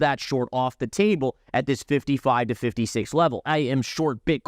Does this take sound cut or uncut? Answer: cut